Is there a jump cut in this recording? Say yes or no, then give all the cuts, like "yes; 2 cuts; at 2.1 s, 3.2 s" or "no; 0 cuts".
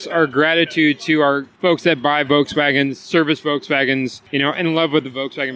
yes; 2 cuts; at 1.5 s, 4.2 s